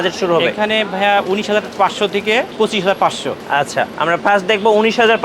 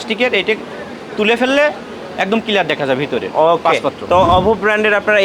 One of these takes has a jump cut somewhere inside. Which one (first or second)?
first